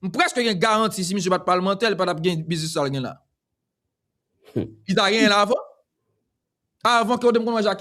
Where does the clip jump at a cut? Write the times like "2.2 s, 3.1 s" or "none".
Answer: none